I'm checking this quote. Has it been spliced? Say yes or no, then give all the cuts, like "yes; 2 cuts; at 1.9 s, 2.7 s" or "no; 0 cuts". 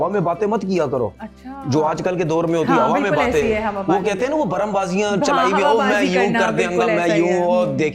no; 0 cuts